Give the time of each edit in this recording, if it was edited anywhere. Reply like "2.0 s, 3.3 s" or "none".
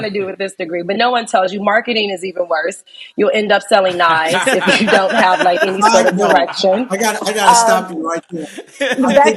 none